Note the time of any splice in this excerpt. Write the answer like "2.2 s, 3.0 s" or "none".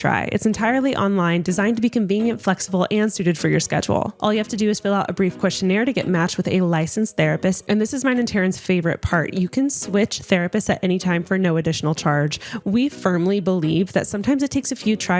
none